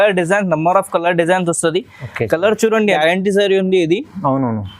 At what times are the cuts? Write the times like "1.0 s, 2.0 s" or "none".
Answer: 3.0 s

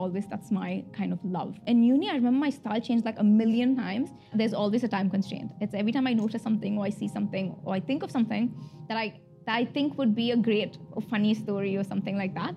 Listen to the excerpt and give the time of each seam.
1.5 s, 4.3 s

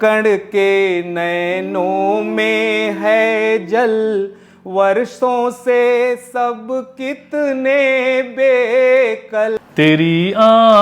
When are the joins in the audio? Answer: 9.6 s

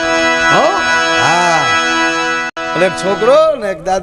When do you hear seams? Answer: 2.4 s

